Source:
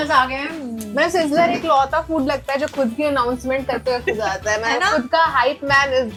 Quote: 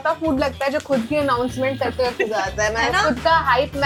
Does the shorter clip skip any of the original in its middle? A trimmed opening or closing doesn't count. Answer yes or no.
no